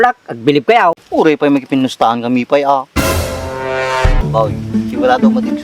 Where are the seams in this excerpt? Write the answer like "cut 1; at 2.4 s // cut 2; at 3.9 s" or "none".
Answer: cut 1; at 1.0 s // cut 2; at 4.2 s